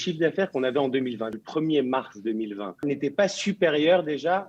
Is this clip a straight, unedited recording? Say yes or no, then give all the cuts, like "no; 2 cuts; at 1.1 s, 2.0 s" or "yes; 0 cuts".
no; 2 cuts; at 1.3 s, 2.8 s